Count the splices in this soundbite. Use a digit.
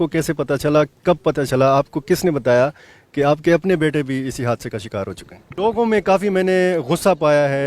1